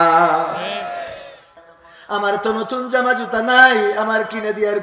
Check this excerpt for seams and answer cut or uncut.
cut